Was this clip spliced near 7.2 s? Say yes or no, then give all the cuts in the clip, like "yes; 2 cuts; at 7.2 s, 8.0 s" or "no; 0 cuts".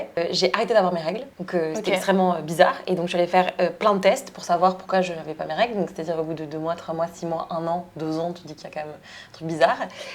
no; 1 cut; at 1.3 s